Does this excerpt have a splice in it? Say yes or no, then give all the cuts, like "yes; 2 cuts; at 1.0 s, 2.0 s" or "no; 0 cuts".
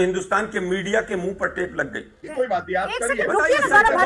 yes; 1 cut; at 2.2 s